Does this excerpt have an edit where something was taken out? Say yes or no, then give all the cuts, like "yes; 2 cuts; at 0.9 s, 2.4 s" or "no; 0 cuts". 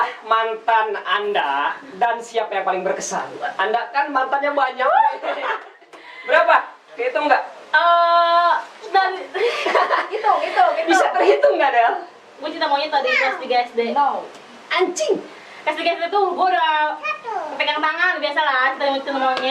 no; 0 cuts